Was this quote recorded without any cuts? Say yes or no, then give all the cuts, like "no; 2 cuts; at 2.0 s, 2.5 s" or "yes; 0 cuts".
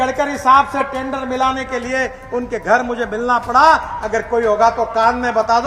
yes; 0 cuts